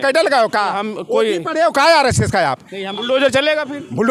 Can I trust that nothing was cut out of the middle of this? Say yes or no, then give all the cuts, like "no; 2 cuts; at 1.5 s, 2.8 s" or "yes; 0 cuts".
no; 1 cut; at 2.8 s